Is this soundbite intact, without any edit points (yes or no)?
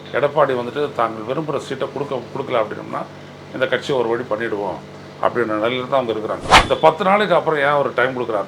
no